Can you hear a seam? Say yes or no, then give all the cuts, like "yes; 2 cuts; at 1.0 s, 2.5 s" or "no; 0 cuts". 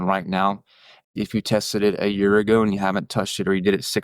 yes; 1 cut; at 1.1 s